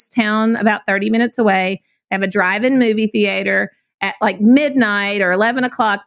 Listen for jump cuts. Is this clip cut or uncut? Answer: uncut